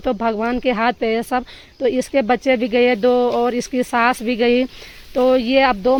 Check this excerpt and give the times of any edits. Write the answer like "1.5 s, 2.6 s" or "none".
none

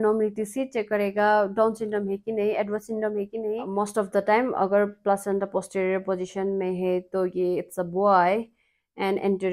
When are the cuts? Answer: 3.6 s

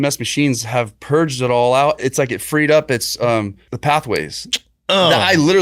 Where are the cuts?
2.0 s, 3.6 s

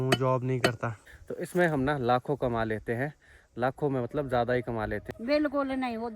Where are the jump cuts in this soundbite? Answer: 1.0 s, 5.1 s

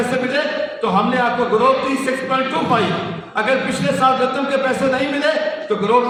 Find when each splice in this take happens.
none

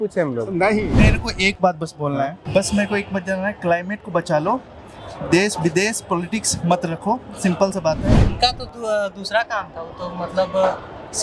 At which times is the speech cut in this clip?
0.9 s, 2.4 s, 8.3 s

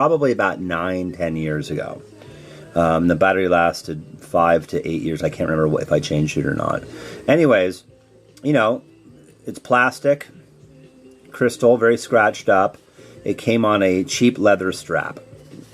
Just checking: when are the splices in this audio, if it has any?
5.0 s

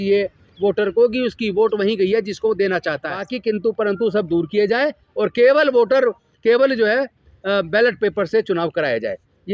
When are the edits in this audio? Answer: 3.3 s

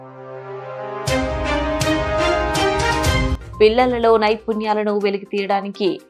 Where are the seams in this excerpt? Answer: 3.3 s

